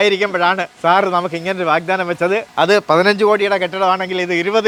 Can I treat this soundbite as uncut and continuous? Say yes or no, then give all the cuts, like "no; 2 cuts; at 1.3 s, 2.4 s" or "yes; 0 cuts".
yes; 0 cuts